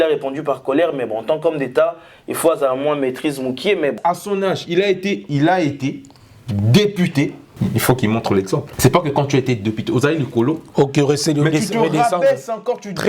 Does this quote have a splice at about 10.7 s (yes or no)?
no